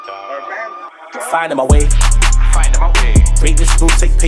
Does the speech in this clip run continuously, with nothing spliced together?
yes; 0 cuts

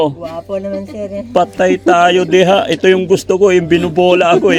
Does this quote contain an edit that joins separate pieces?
no; 0 cuts

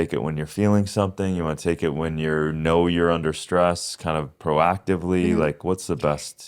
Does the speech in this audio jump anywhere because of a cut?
no; 0 cuts

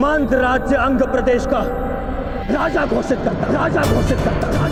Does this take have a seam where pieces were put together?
no; 0 cuts

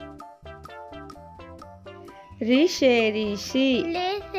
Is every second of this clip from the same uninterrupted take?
no; 1 cut; at 2.4 s

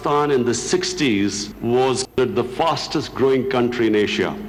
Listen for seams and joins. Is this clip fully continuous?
yes; 0 cuts

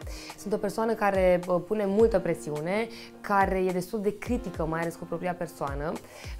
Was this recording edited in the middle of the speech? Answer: no; 0 cuts

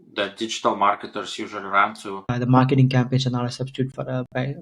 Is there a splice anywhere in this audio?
yes; 1 cut; at 2.3 s

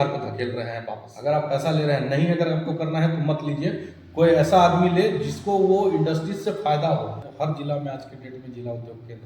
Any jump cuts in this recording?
yes; 2 cuts; at 1.0 s, 7.2 s

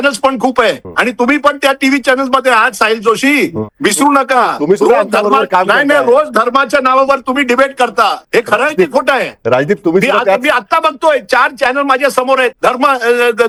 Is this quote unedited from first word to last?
yes; 0 cuts

